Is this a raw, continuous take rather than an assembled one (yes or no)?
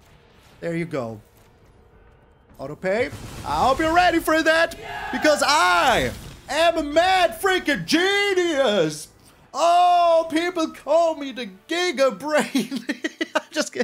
yes